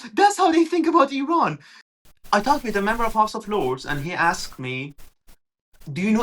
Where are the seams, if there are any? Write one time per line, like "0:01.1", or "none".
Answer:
0:01.9